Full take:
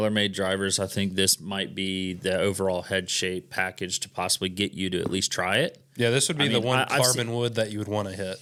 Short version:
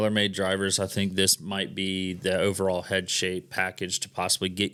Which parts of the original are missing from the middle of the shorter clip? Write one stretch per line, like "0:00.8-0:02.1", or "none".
none